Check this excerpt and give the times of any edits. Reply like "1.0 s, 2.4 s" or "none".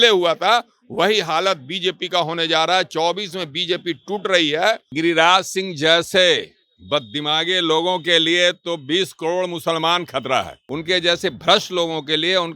4.9 s, 10.6 s